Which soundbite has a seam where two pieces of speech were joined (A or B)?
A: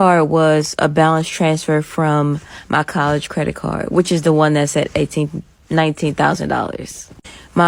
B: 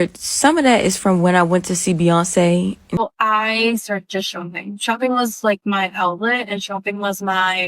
B